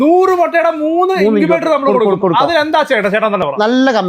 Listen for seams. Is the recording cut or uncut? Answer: uncut